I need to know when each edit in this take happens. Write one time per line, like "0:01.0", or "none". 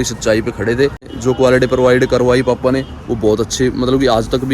0:01.1